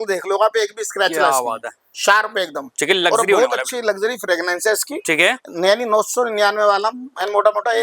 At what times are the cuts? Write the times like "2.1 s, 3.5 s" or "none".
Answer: none